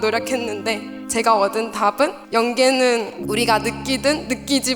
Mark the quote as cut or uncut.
cut